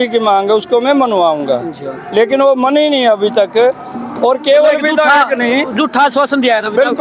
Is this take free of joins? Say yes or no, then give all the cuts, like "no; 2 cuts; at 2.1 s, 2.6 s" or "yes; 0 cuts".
yes; 0 cuts